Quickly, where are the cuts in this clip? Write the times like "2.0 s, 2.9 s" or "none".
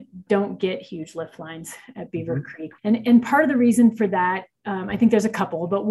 2.6 s